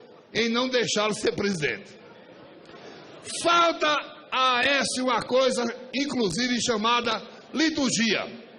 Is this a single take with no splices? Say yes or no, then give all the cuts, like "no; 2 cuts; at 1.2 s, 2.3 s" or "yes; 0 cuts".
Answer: no; 1 cut; at 7.3 s